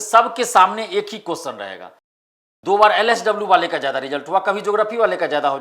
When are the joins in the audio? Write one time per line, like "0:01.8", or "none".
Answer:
0:02.2